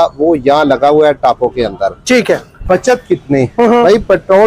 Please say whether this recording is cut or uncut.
cut